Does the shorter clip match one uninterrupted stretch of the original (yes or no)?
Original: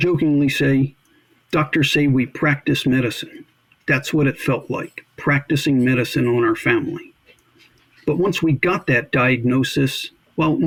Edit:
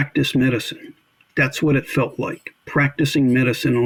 yes